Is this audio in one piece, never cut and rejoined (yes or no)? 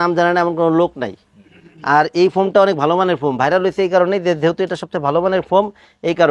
yes